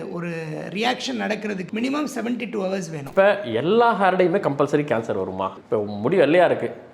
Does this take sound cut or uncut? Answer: cut